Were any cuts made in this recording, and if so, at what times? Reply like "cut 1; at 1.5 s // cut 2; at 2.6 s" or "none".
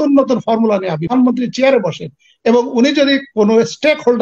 cut 1; at 1.1 s